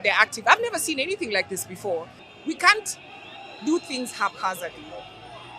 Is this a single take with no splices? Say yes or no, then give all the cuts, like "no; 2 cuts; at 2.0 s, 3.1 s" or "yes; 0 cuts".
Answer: no; 1 cut; at 2.2 s